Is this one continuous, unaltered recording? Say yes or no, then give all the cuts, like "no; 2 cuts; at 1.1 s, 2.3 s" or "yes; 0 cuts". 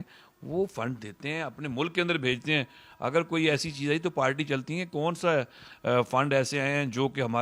yes; 0 cuts